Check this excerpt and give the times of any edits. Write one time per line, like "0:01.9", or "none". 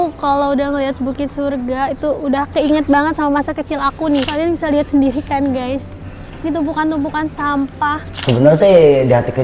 0:04.3
0:08.2